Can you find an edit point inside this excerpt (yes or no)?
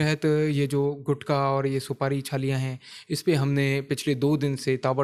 no